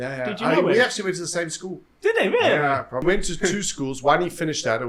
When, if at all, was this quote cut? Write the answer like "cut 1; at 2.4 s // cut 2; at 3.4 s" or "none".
cut 1; at 3.0 s

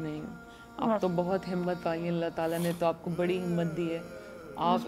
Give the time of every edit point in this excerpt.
none

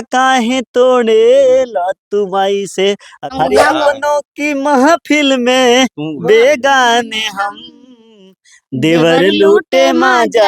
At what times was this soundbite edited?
cut 1; at 3.3 s

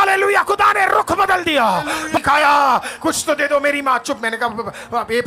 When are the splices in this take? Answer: cut 1; at 2.2 s

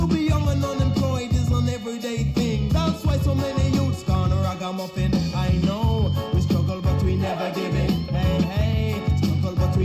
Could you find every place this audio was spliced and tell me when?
none

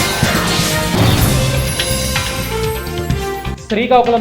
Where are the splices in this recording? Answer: cut 1; at 3.3 s

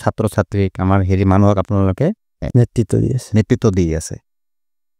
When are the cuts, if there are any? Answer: none

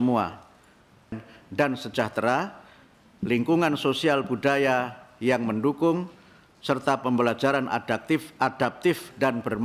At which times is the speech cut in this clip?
cut 1; at 1.1 s

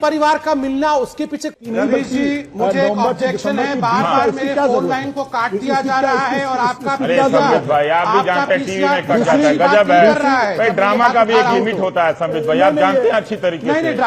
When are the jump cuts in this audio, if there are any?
cut 1; at 1.6 s

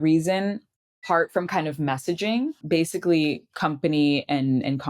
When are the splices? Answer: cut 1; at 1.0 s // cut 2; at 2.6 s

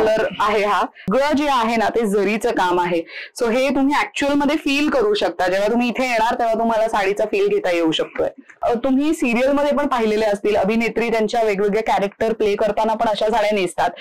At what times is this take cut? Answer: cut 1; at 1.1 s // cut 2; at 8.6 s

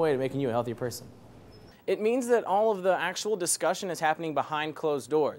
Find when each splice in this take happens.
cut 1; at 1.7 s

